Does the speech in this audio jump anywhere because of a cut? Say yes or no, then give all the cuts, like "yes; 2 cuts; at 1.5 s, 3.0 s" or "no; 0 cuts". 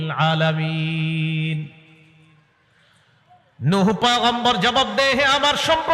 no; 0 cuts